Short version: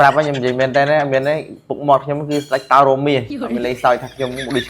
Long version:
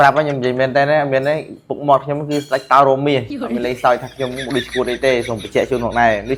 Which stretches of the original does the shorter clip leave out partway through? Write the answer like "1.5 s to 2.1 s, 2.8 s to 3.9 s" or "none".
none